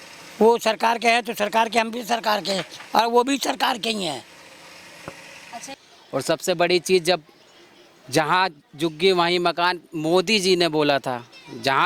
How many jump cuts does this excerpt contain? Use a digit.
1